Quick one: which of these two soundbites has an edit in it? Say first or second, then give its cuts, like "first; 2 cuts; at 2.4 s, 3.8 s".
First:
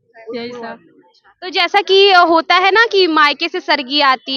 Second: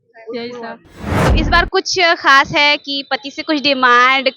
second; 1 cut; at 1.2 s